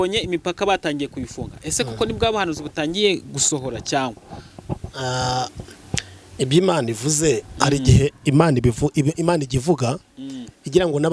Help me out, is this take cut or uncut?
uncut